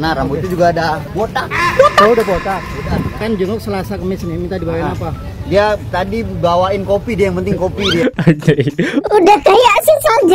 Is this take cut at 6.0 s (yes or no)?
no